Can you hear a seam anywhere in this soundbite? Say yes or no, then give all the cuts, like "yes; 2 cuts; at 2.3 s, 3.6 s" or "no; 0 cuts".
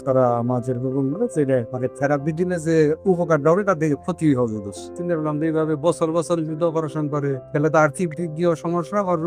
yes; 3 cuts; at 1.7 s, 4.9 s, 7.4 s